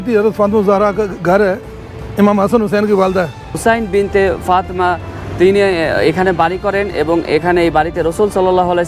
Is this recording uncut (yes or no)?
no